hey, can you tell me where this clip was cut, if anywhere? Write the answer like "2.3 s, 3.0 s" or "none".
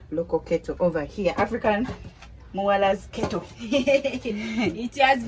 none